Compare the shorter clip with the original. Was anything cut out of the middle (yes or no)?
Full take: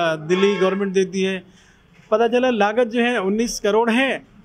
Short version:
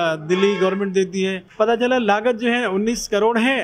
yes